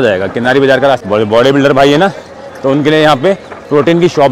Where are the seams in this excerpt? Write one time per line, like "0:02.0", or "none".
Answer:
0:01.0

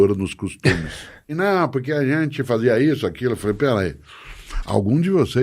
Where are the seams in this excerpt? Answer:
0:01.3

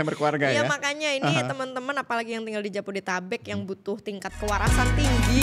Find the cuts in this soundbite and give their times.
none

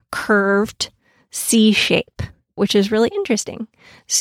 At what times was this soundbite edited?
0:02.6

